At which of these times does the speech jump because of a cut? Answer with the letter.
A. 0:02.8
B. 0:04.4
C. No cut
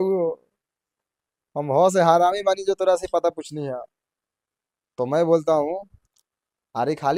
C